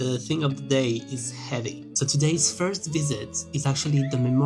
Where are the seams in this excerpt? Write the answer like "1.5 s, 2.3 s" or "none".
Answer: 2.0 s